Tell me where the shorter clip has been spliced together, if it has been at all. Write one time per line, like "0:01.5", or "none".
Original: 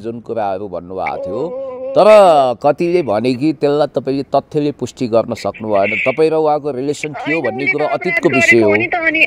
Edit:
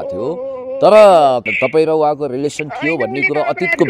0:01.4